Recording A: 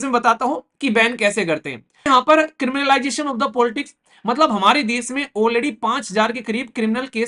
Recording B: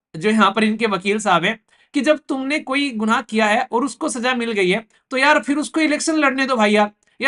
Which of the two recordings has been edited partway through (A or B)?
A